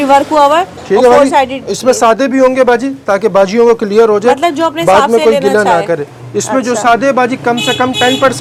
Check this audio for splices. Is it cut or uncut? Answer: uncut